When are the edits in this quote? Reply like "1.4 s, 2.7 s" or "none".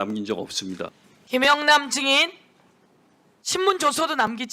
1.0 s